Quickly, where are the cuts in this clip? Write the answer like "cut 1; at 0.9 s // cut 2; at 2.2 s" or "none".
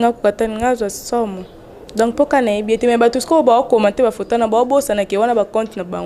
none